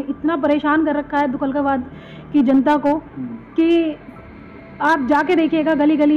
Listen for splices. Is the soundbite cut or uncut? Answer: uncut